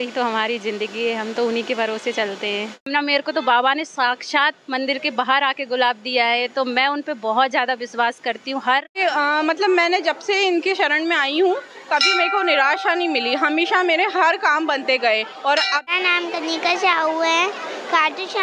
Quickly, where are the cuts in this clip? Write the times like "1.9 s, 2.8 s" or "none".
2.9 s, 9.0 s, 15.8 s